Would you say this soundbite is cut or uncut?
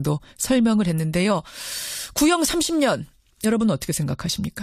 cut